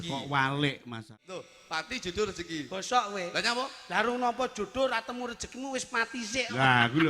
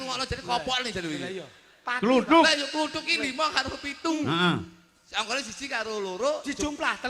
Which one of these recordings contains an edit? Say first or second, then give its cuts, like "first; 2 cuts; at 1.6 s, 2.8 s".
first; 1 cut; at 1.1 s